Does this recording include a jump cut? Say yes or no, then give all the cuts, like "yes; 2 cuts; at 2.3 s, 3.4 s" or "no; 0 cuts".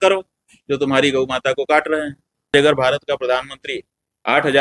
yes; 1 cut; at 2.5 s